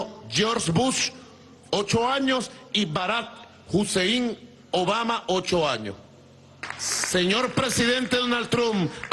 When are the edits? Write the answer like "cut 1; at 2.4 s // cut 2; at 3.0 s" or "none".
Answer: cut 1; at 2.8 s